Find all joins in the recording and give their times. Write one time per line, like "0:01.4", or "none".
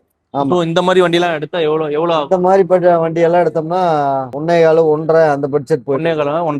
none